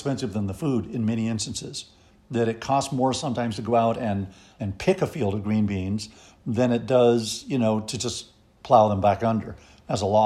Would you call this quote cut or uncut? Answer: uncut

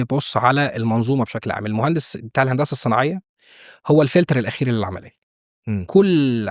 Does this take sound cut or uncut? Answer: uncut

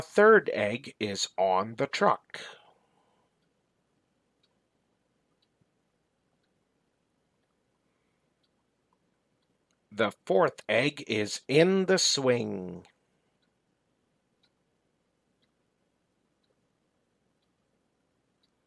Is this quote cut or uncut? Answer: uncut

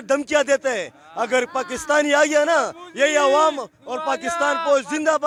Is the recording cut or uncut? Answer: uncut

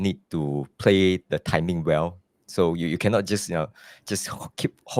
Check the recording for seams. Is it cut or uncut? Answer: uncut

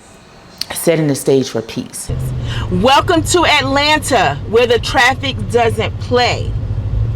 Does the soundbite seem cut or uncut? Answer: cut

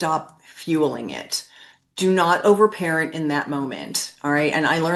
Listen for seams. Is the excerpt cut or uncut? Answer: uncut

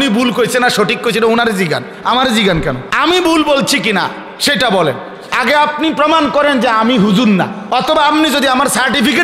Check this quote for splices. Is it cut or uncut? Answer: cut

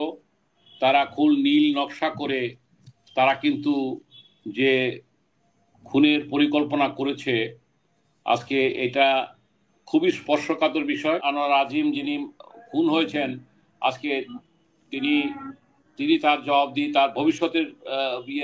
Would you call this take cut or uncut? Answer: cut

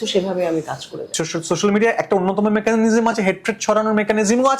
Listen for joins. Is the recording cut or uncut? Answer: cut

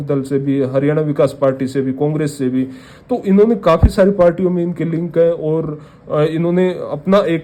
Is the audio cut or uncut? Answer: uncut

